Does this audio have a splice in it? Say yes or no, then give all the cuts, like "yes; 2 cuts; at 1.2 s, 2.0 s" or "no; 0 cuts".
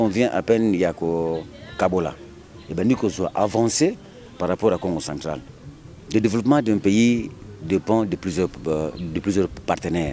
yes; 1 cut; at 5.5 s